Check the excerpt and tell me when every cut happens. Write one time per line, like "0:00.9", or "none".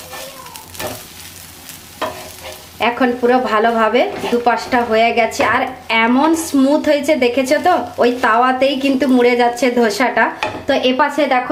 none